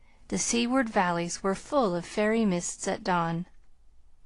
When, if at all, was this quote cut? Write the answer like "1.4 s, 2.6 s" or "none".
1.8 s